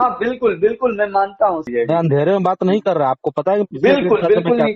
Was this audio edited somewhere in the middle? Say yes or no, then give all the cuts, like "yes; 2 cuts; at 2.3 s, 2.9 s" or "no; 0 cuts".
yes; 1 cut; at 1.6 s